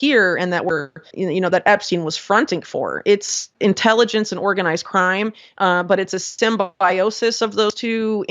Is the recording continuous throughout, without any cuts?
no; 2 cuts; at 1.1 s, 3.4 s

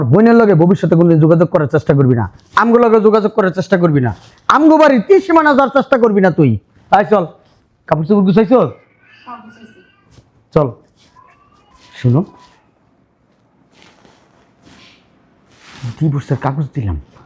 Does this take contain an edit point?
no; 0 cuts

